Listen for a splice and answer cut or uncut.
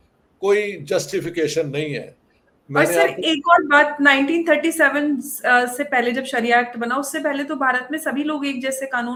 uncut